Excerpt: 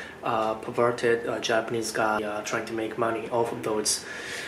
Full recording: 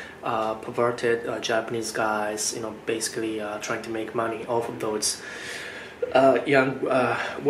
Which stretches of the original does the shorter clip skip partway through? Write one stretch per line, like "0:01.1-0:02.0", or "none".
0:02.2-0:03.4

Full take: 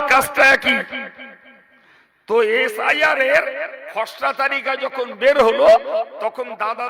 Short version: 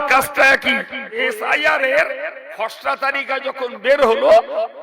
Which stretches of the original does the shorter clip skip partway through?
0:01.2-0:02.5

